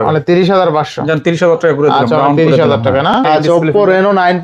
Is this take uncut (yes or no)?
no